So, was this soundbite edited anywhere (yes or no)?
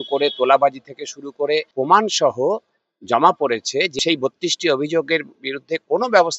yes